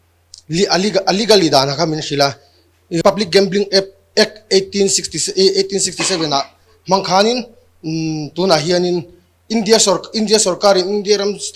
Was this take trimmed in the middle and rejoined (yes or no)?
yes